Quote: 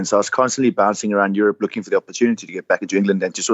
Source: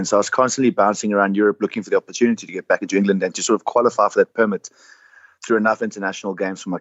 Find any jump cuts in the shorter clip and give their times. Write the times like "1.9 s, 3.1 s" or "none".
none